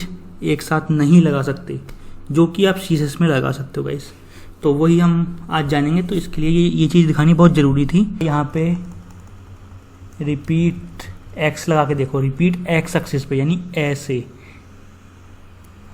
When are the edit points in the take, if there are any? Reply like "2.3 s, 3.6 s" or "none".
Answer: 8.2 s